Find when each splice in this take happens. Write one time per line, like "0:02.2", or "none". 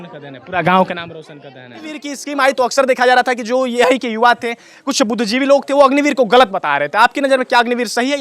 0:02.2